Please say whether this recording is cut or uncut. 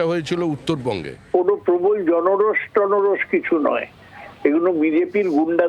cut